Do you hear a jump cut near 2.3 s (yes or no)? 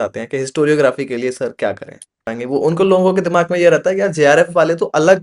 yes